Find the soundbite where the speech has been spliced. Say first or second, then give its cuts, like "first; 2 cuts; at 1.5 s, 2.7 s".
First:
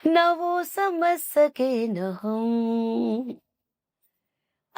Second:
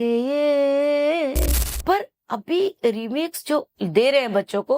second; 1 cut; at 1.7 s